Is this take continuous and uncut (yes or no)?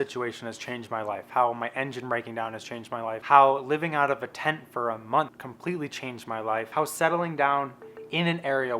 no